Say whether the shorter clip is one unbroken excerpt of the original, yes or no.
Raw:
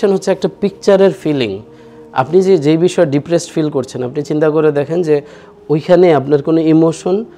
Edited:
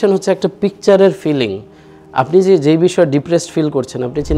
yes